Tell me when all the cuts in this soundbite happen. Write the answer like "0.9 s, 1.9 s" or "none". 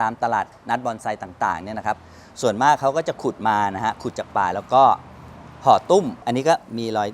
6.2 s